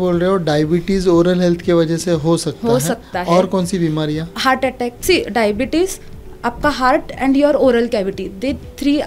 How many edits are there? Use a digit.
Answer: 1